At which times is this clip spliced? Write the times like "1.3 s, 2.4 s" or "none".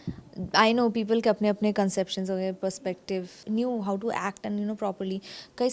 3.4 s